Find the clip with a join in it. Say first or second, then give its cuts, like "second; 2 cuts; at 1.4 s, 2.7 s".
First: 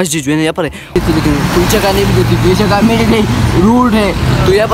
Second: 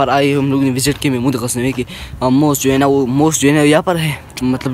first; 1 cut; at 1.0 s